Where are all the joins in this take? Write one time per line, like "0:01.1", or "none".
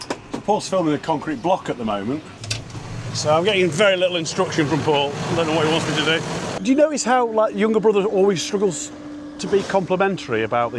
0:02.3
0:06.5

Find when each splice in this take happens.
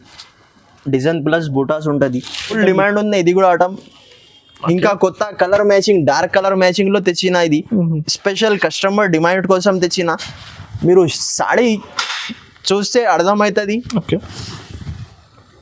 0:02.6

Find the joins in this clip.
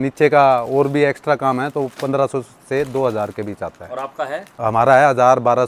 none

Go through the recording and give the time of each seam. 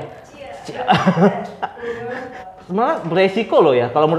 0:02.4

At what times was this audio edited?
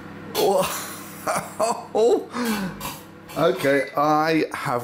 none

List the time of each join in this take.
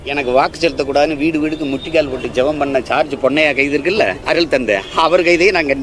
none

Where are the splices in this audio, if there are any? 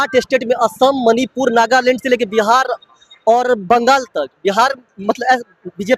none

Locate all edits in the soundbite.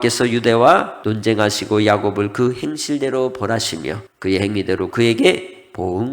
0:01.0
0:04.0

